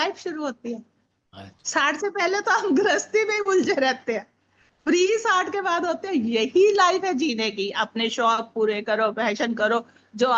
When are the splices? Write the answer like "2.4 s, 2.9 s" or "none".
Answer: none